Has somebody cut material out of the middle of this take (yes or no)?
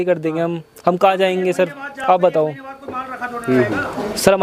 no